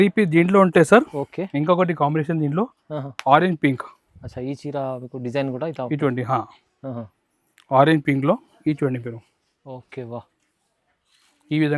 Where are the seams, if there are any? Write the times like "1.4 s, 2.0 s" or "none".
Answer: none